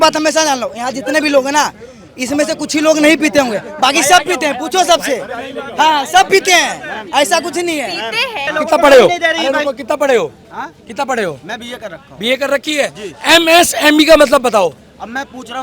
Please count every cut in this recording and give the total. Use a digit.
1